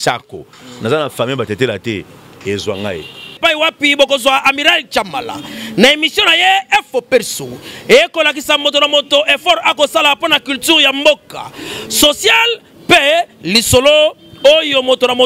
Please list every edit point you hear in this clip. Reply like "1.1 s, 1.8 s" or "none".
3.3 s